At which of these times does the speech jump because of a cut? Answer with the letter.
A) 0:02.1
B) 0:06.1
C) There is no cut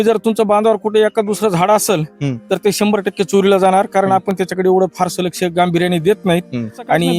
C